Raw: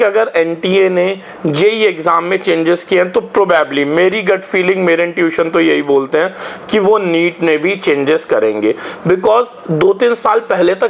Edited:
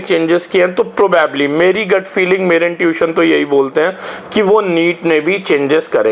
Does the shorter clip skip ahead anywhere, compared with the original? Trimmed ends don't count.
no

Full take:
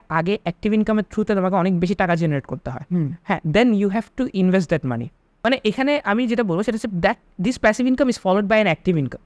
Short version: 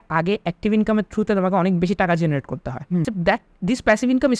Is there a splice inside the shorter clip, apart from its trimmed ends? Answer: yes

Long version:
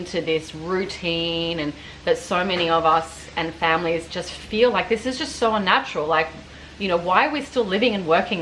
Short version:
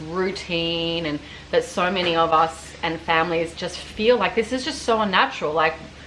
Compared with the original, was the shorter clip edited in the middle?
no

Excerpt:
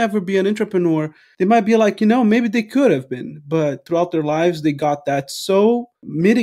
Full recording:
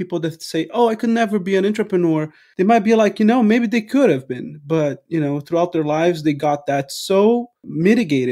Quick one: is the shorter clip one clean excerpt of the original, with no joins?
no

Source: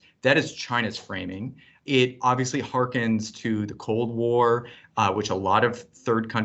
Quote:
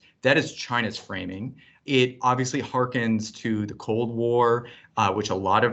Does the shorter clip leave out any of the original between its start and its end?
no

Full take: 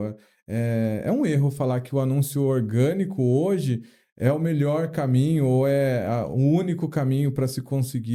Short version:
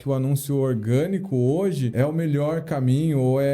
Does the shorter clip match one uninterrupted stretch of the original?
no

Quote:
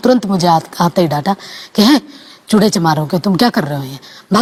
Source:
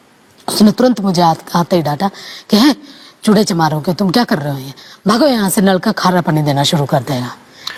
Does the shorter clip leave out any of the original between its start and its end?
no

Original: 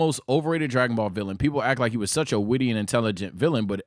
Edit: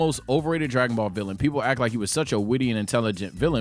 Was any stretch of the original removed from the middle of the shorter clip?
no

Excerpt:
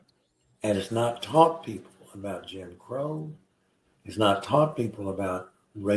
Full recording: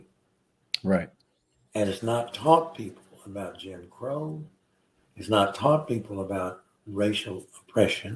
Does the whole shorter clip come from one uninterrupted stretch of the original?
yes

